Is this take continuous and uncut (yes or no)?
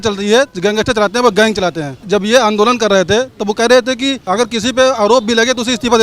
no